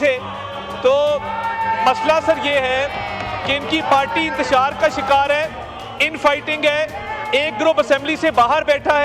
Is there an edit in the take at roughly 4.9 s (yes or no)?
no